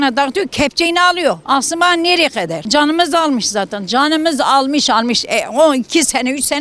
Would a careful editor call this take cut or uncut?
cut